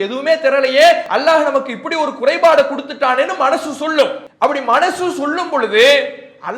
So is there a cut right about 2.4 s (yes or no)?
no